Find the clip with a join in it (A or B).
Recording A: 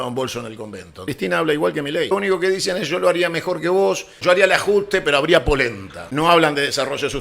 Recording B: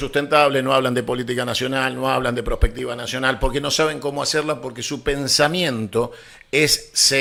A